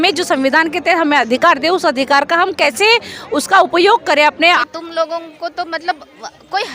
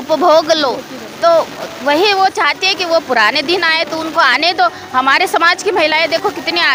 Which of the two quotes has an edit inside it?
first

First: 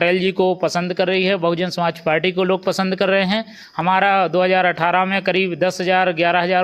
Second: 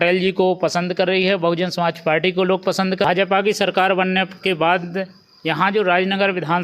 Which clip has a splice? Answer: second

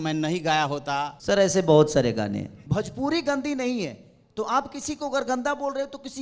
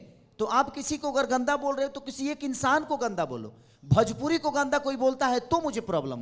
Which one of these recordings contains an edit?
first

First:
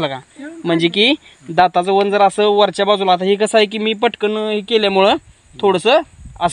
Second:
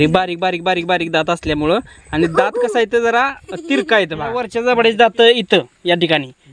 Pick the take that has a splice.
second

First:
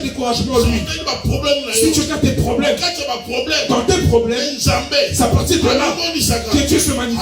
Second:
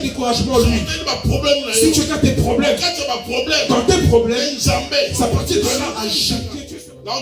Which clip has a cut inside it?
second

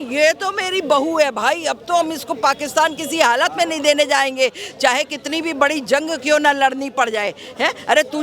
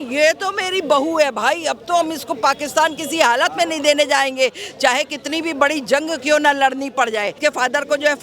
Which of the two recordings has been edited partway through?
second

